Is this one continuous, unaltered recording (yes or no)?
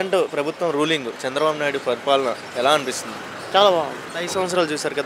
no